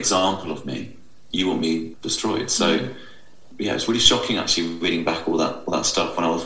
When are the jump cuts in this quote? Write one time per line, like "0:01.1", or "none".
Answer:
0:01.2
0:01.9
0:03.5